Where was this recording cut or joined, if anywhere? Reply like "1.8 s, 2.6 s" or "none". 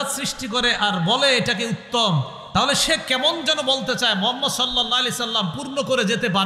none